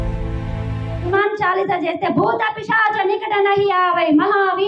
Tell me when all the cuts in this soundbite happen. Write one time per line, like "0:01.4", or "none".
0:01.1